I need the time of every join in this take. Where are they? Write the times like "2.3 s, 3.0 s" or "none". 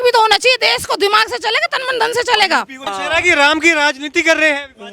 2.9 s

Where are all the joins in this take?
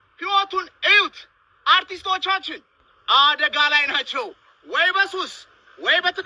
none

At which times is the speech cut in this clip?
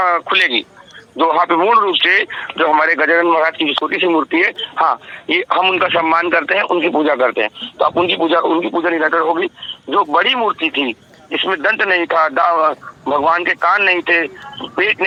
none

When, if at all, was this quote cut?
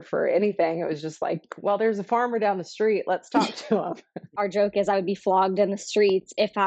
4.3 s

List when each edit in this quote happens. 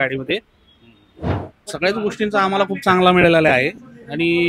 1.5 s

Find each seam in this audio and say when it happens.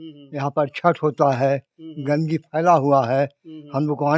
none

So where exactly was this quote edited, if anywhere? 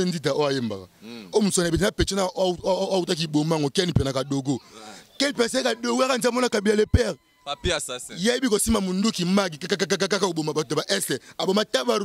none

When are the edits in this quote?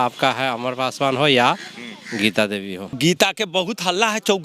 2.9 s

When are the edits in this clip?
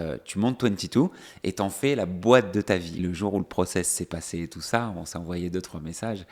3.0 s

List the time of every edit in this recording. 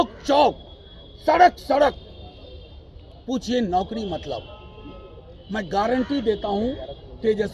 none

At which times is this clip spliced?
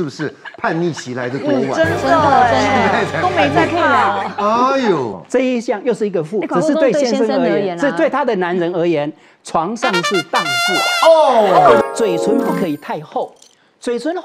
11.8 s

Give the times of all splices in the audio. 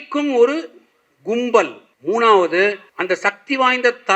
1.9 s, 2.9 s

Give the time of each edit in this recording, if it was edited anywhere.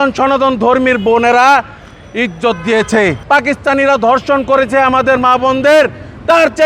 3.2 s

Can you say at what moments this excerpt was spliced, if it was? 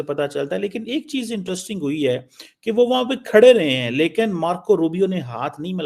none

